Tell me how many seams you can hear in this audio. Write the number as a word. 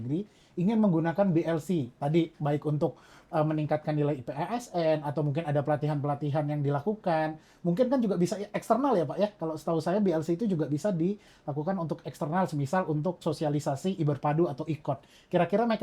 zero